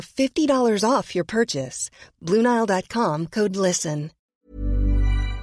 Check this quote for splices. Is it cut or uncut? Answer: cut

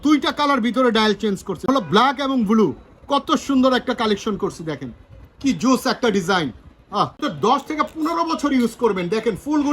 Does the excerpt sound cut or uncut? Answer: cut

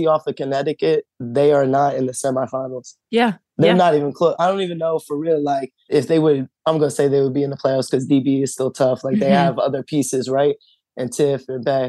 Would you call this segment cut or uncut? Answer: uncut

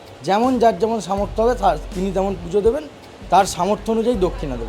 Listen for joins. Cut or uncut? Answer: uncut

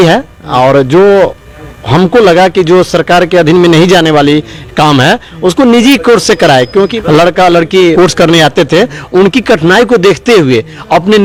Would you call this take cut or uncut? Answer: uncut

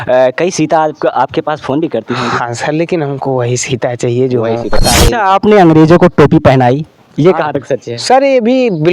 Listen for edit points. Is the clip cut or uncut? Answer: cut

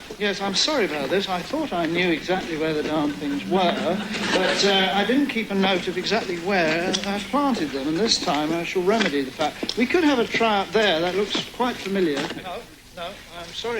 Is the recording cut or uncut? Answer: cut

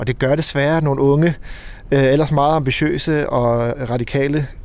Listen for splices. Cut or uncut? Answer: cut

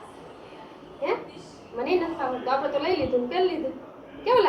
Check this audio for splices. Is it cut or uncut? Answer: uncut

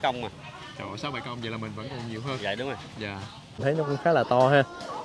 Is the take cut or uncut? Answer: cut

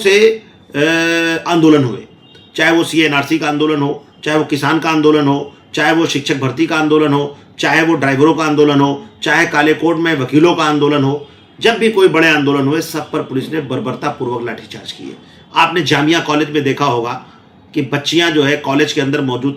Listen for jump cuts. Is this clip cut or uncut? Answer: uncut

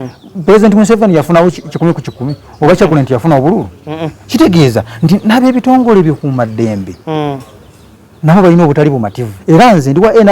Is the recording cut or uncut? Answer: cut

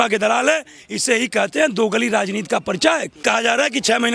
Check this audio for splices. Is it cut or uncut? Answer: cut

